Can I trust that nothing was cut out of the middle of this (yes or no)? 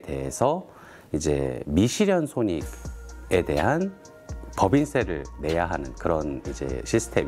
yes